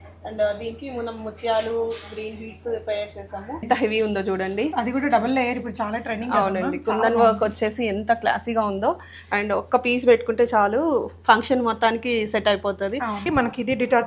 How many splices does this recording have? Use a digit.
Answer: 2